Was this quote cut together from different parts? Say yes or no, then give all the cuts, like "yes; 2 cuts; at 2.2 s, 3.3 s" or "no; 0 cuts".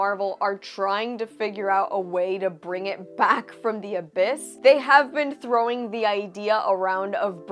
no; 0 cuts